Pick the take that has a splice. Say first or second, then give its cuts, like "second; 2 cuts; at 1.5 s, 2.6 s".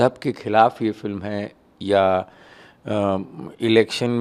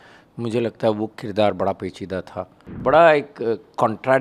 second; 1 cut; at 2.6 s